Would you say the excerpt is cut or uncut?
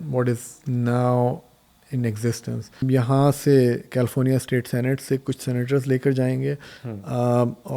cut